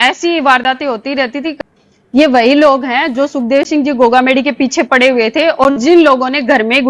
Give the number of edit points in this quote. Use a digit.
1